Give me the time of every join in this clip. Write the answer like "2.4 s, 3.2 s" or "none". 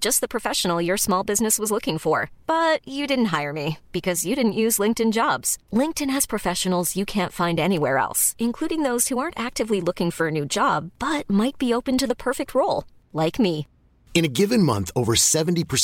none